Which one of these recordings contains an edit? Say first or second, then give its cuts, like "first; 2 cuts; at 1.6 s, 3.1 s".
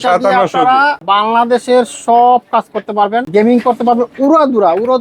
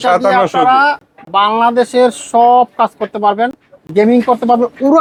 first; 2 cuts; at 1.0 s, 3.3 s